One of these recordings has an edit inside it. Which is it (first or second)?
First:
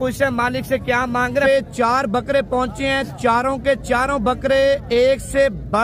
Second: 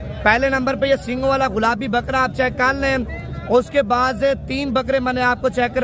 first